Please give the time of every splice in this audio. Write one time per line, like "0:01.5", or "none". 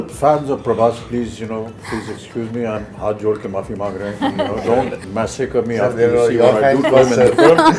0:05.0